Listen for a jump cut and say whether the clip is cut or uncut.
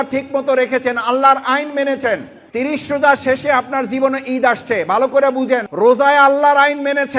cut